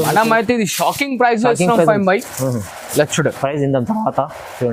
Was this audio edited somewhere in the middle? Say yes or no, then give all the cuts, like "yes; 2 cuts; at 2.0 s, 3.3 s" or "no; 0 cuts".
no; 0 cuts